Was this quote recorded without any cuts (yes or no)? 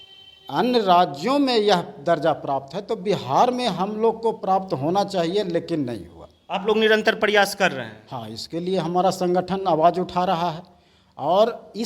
yes